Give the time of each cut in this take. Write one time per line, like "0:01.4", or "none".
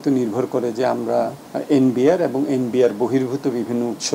0:01.5